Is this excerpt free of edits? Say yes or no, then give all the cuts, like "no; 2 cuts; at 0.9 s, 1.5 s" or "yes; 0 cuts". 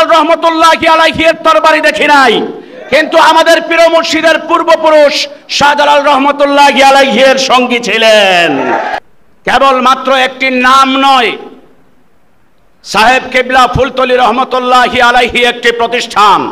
no; 1 cut; at 8.9 s